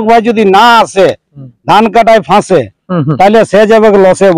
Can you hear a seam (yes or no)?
no